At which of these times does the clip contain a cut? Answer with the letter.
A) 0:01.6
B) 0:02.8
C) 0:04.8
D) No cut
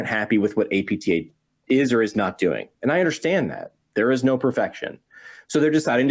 D